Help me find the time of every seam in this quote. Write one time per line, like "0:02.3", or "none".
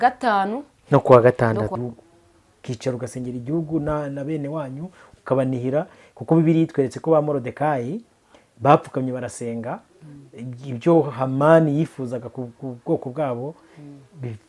0:01.7